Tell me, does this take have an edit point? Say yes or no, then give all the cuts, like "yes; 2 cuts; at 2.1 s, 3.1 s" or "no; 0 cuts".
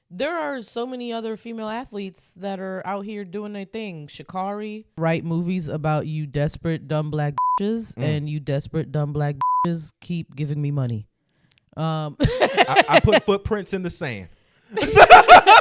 yes; 1 cut; at 4.9 s